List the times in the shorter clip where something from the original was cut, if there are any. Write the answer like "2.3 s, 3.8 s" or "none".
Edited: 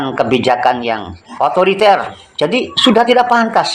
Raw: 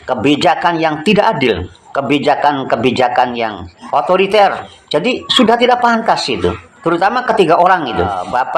none